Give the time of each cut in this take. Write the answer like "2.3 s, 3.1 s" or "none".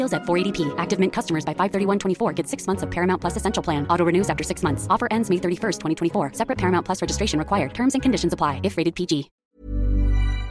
9.3 s